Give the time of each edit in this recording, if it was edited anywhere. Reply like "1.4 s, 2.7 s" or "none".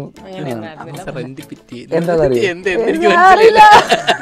none